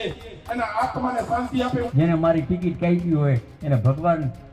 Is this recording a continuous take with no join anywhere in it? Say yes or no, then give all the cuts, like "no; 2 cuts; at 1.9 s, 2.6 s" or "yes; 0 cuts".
no; 1 cut; at 1.9 s